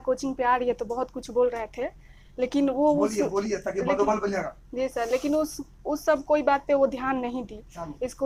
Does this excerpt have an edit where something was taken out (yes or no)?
no